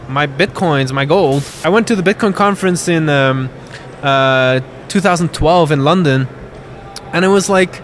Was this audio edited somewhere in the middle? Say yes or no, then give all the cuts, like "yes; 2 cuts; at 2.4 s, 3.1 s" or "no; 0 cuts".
yes; 1 cut; at 1.5 s